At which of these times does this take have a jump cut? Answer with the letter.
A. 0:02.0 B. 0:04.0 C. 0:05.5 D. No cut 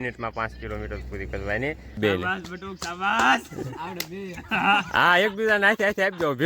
A